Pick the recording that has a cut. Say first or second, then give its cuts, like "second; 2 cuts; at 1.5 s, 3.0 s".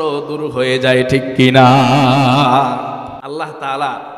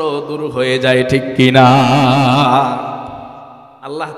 first; 1 cut; at 3.2 s